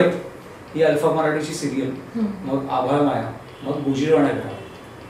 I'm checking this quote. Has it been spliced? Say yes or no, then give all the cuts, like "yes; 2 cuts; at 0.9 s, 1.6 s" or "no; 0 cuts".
no; 0 cuts